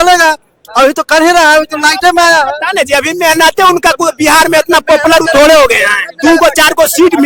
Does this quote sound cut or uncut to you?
uncut